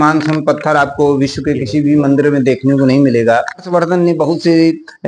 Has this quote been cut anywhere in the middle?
yes; 1 cut; at 3.7 s

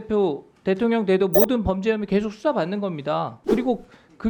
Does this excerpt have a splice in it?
yes; 1 cut; at 3.4 s

